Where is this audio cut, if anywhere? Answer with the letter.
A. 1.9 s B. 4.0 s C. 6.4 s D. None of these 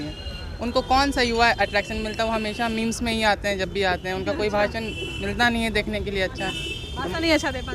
D